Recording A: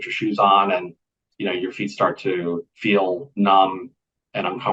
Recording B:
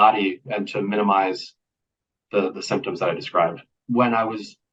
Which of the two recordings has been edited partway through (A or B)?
B